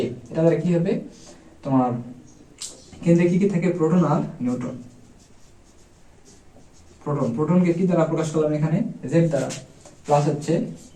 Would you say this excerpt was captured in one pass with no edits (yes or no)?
yes